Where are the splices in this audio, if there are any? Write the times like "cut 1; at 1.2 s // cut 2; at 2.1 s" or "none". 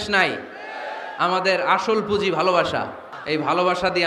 cut 1; at 3.1 s

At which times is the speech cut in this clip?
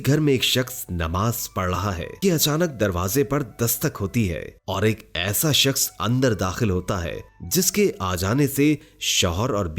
cut 1; at 2.1 s

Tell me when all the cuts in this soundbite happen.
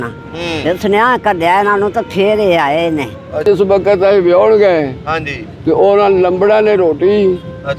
cut 1; at 3.4 s

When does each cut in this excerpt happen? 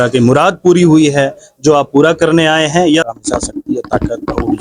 cut 1; at 3.1 s

